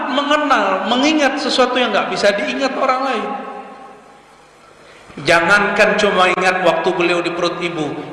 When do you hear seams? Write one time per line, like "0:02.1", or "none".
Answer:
none